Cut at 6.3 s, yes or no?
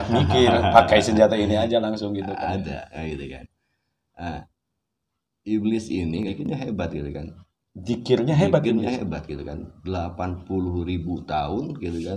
yes